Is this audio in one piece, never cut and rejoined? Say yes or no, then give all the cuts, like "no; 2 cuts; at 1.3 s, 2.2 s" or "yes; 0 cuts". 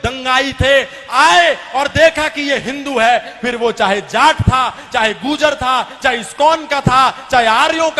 yes; 0 cuts